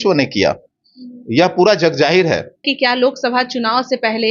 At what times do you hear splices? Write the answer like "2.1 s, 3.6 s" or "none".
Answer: 2.6 s